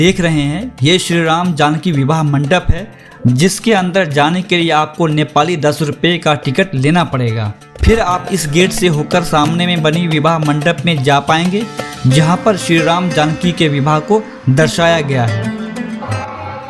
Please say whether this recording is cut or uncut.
uncut